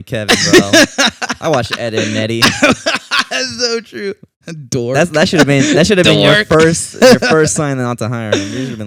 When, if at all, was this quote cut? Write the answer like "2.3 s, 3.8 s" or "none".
none